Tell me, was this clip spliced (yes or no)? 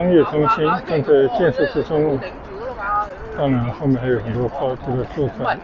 no